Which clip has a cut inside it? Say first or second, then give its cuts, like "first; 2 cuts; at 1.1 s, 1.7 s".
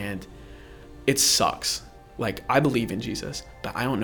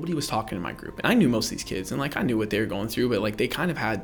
first; 1 cut; at 2.0 s